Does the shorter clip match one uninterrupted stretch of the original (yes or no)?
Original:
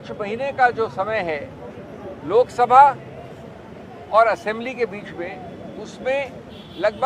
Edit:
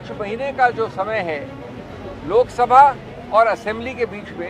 no